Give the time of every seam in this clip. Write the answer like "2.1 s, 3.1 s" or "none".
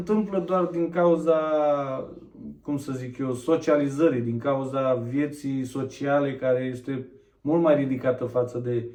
none